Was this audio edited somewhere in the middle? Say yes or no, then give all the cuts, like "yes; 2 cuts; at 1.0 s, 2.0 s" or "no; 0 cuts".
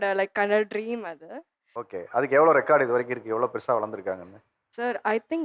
no; 0 cuts